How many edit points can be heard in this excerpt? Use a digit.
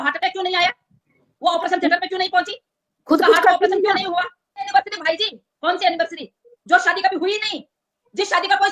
1